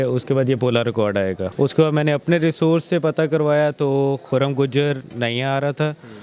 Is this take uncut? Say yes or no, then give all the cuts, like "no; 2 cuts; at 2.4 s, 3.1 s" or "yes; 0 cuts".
no; 1 cut; at 1.5 s